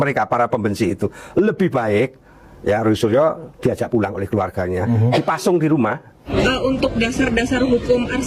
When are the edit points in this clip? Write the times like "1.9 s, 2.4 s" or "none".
6.3 s